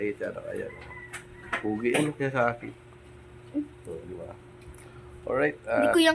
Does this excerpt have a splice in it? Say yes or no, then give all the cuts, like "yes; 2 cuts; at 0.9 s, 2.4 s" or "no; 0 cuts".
no; 0 cuts